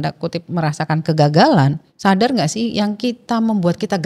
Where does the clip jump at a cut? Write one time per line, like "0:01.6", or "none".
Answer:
0:01.9